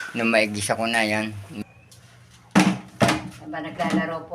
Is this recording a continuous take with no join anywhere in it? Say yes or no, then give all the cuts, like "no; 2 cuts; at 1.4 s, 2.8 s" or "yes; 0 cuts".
no; 1 cut; at 1.6 s